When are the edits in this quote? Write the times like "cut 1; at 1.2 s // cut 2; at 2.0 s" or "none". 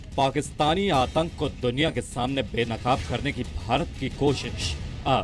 cut 1; at 3.4 s